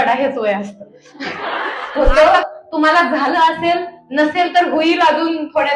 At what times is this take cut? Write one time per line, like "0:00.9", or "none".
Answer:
0:02.1

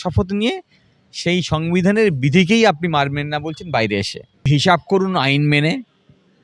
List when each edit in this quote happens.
0:04.5

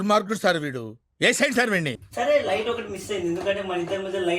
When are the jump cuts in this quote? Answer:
0:02.0

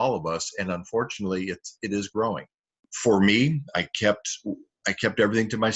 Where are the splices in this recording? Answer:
0:02.9

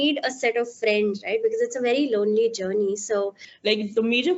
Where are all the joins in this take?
0:03.5

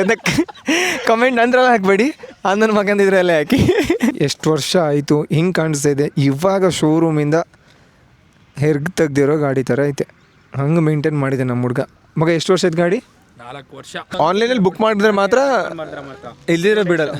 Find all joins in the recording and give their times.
0:04.2
0:14.1

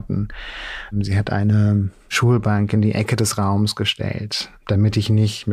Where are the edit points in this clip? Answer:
0:00.9
0:02.1
0:04.6

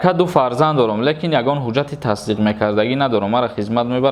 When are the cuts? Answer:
none

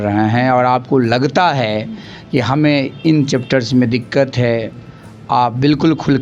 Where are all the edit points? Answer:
none

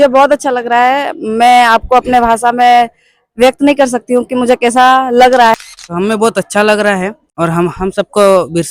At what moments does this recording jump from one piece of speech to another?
0:05.5
0:07.2

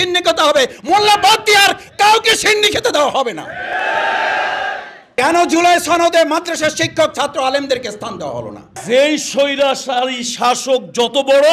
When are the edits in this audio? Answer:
0:05.1
0:08.8

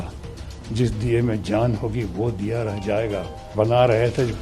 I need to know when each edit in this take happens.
0:03.5

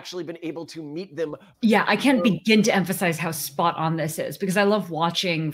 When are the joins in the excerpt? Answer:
0:01.5

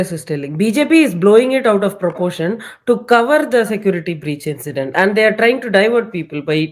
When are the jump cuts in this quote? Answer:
none

